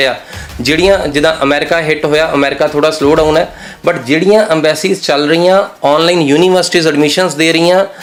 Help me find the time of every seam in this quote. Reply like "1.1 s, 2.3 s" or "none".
none